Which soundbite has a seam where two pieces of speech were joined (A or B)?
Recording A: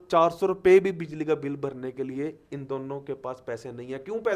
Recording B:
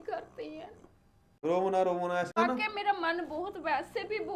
B